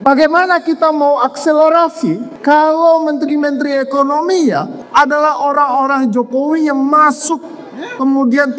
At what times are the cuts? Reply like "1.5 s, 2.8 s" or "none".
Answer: 2.3 s, 4.8 s